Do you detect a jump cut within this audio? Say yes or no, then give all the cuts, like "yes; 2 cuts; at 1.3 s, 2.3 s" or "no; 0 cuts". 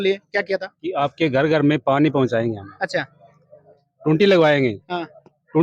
no; 0 cuts